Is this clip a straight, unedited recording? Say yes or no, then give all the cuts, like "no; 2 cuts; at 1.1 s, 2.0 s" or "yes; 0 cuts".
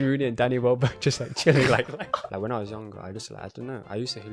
no; 1 cut; at 2.2 s